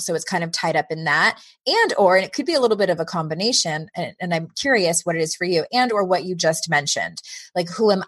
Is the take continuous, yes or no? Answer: yes